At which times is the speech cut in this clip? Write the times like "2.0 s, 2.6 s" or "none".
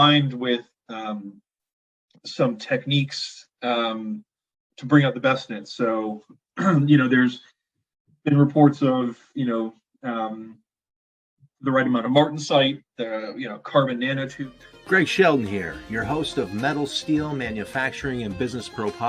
14.3 s